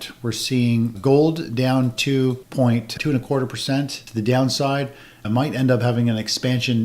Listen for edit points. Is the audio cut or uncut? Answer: uncut